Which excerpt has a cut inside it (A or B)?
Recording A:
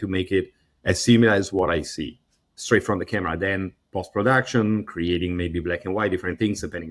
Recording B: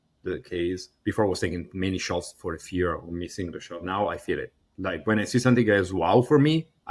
A